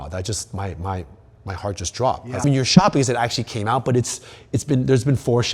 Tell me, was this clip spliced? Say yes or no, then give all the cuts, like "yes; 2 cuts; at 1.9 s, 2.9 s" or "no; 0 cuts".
no; 0 cuts